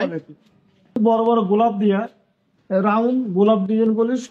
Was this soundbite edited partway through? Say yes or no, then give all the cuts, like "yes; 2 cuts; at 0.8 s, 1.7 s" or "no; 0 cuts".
yes; 1 cut; at 1.0 s